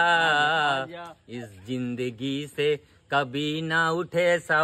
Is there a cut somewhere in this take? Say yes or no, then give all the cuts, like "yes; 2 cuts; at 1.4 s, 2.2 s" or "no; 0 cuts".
no; 0 cuts